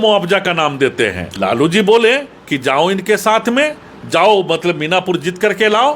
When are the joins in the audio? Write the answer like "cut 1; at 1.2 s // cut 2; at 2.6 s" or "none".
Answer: cut 1; at 1.3 s